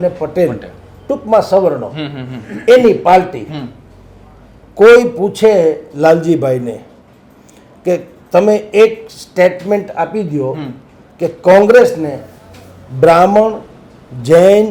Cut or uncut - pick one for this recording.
uncut